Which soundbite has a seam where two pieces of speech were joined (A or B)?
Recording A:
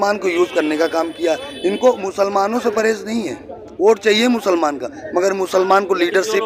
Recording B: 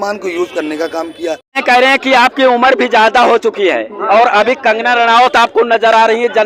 B